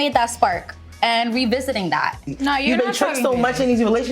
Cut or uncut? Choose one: cut